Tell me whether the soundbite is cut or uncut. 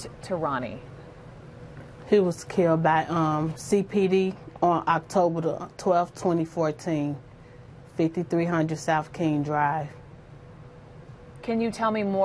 cut